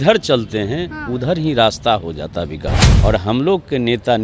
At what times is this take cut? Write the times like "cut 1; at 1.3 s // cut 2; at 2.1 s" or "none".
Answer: cut 1; at 2.9 s